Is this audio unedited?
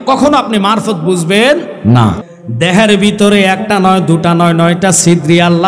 no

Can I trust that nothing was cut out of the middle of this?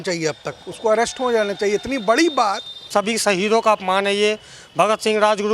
no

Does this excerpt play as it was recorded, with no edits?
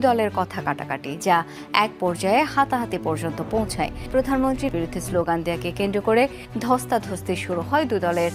yes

